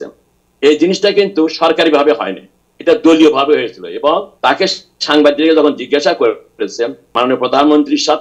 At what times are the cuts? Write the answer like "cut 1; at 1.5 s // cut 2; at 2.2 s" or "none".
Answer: cut 1; at 4.3 s // cut 2; at 7.1 s